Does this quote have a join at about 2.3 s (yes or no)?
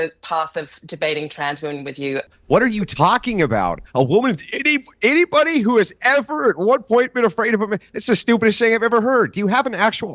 yes